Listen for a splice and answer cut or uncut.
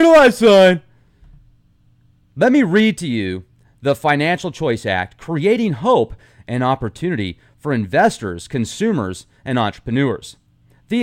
uncut